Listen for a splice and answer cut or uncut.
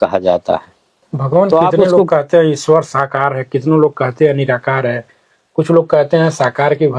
cut